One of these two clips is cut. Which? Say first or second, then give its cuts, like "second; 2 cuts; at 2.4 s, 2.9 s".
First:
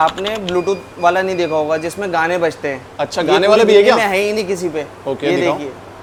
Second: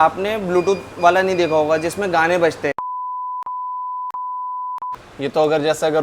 second; 2 cuts; at 3.0 s, 4.9 s